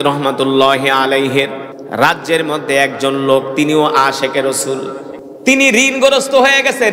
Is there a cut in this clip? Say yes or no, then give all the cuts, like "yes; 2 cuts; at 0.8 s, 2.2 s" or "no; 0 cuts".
yes; 2 cuts; at 1.7 s, 5.2 s